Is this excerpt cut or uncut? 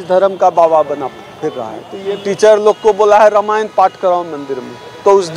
cut